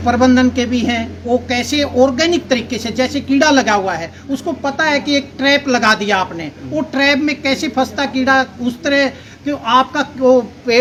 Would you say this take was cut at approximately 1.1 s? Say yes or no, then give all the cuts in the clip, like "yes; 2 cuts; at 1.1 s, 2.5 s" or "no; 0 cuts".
no; 0 cuts